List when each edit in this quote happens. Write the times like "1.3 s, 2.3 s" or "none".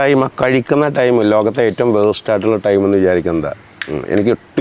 none